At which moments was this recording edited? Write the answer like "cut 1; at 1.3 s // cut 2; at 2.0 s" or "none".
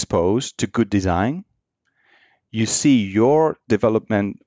none